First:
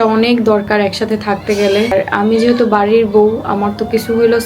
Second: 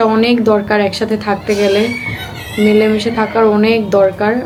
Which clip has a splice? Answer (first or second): first